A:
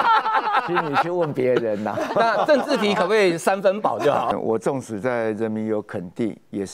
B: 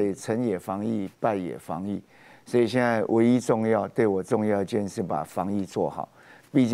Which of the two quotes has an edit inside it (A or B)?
A